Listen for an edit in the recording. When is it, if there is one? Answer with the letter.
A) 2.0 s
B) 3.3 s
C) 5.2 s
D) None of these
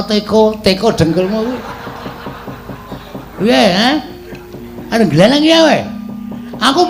A